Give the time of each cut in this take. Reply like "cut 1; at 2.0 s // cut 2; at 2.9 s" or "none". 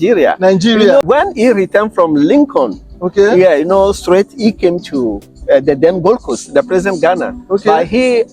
cut 1; at 1.0 s